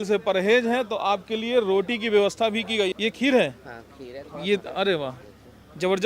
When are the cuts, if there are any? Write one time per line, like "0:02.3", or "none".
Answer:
0:02.9

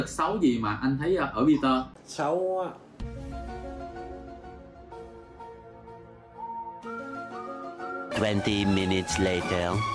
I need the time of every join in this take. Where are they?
none

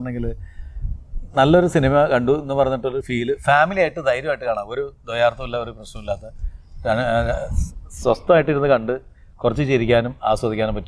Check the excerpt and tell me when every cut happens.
none

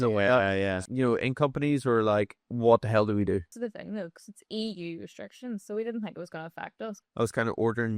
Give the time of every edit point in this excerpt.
0:00.8
0:02.4
0:03.5
0:06.9

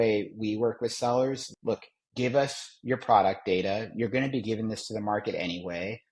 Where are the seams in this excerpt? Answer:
0:01.5

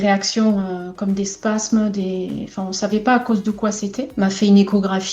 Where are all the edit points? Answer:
0:04.0

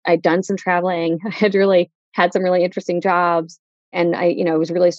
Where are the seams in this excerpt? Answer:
0:02.0

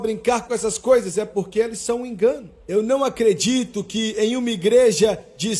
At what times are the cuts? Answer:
0:02.5

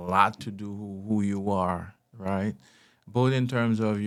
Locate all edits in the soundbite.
none

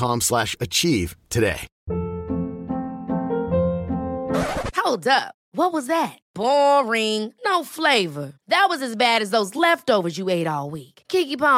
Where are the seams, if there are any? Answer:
none

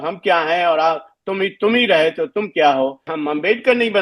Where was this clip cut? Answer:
0:03.1

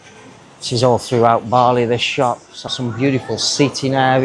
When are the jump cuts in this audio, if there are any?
0:02.7

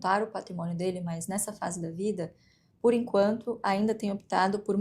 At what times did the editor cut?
none

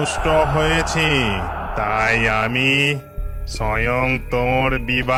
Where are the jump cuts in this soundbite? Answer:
none

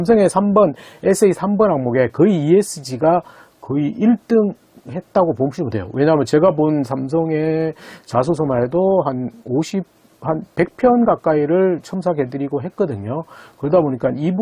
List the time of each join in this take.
none

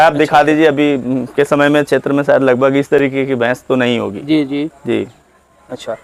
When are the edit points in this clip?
none

